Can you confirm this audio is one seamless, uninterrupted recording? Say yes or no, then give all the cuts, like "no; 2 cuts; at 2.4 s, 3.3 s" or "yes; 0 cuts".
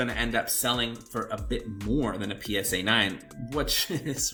yes; 0 cuts